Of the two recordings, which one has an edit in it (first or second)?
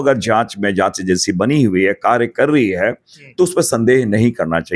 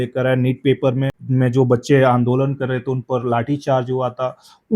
second